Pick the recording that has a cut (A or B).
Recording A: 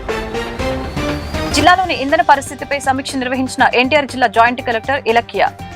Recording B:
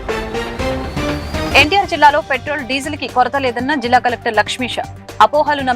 A